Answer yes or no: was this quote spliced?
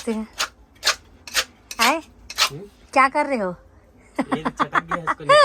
no